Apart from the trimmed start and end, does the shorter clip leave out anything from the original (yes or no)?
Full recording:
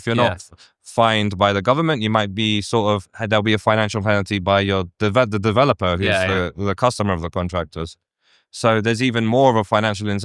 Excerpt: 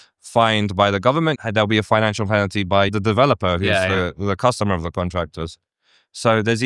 yes